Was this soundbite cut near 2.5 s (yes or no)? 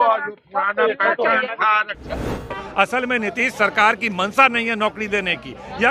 yes